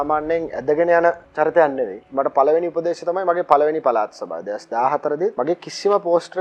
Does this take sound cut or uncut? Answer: cut